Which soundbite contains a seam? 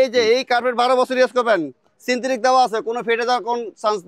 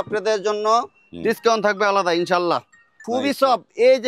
second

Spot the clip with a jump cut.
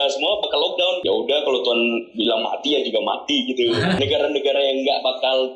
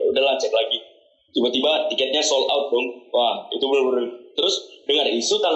first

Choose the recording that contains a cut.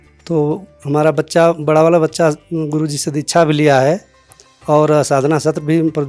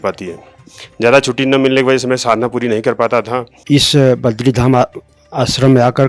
second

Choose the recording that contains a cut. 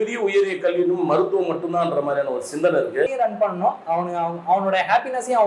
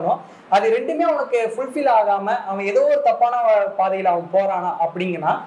first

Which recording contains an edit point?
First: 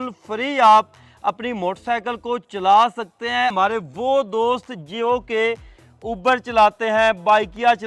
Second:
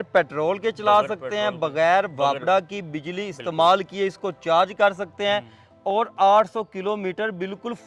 first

